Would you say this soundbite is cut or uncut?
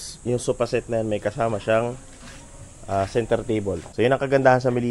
cut